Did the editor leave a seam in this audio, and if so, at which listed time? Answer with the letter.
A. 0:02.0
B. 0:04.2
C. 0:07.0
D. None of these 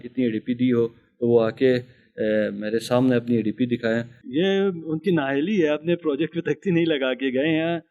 B